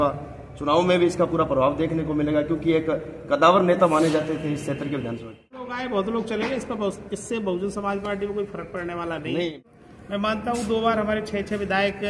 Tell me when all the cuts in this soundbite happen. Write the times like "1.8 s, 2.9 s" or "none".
5.8 s, 9.7 s